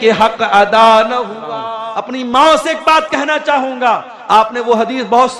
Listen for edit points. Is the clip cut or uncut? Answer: cut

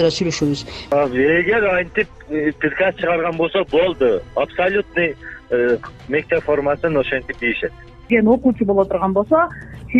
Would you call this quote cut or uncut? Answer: cut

